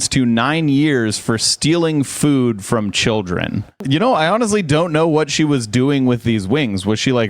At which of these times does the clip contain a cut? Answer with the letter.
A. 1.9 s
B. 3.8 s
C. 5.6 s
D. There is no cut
B